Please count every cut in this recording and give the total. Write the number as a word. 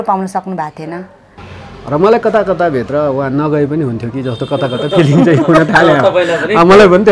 one